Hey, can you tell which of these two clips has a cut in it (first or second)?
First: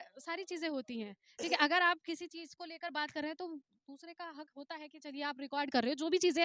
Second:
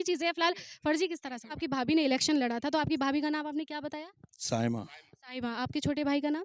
second